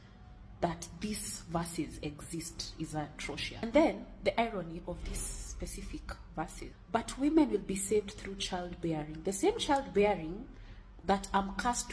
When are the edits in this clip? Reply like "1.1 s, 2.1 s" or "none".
3.6 s, 6.7 s